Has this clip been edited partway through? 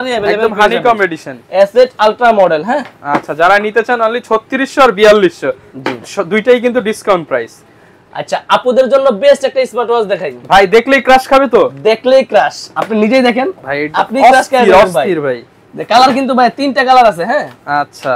no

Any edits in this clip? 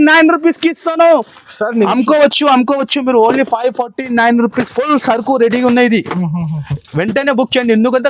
yes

